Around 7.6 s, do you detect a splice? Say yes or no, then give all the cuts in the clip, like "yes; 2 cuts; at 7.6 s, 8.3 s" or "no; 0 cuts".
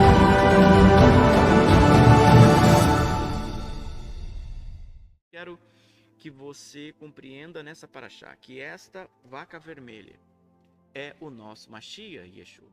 no; 1 cut; at 5.2 s